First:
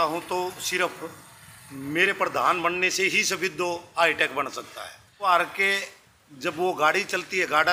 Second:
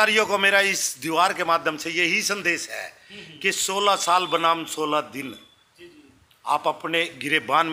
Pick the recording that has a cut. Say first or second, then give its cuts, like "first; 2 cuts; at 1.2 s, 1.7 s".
first; 1 cut; at 5.3 s